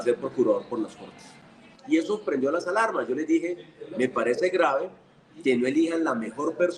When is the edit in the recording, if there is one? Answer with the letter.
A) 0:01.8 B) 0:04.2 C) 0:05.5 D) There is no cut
D